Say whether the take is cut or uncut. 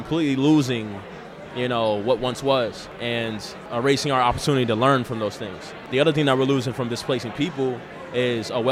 cut